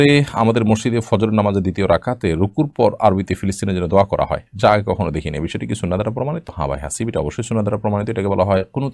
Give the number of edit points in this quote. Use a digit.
0